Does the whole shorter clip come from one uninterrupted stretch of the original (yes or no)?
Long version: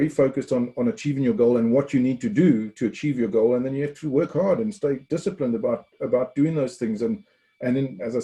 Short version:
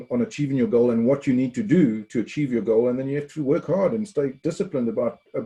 yes